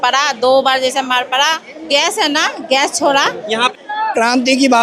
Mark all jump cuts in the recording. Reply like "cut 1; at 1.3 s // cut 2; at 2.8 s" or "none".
cut 1; at 1.9 s // cut 2; at 3.7 s